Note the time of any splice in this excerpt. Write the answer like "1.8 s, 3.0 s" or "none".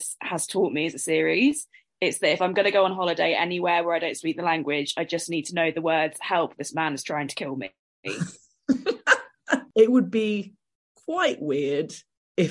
9.7 s